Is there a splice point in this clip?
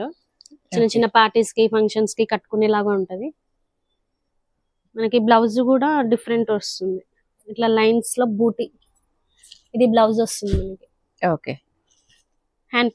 no; 0 cuts

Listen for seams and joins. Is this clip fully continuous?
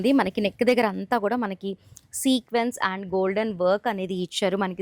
yes; 0 cuts

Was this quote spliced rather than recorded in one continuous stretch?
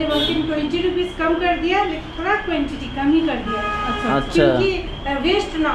no; 0 cuts

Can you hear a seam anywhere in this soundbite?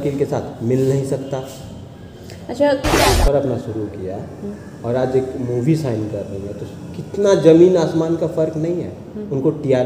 yes; 1 cut; at 3.0 s

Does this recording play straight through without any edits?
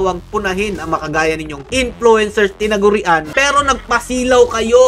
no; 2 cuts; at 1.6 s, 3.3 s

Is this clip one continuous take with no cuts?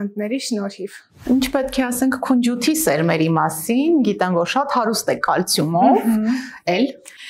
no; 1 cut; at 1.1 s

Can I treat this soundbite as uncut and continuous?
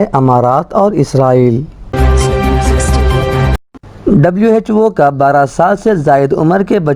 no; 2 cuts; at 1.8 s, 3.6 s

